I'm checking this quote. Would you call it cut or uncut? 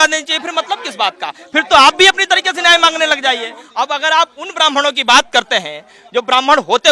cut